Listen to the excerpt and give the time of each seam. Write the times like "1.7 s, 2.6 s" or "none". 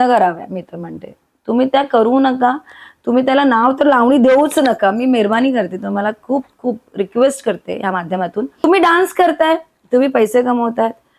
8.6 s